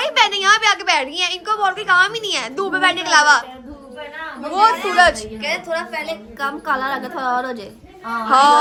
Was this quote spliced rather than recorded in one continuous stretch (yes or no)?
no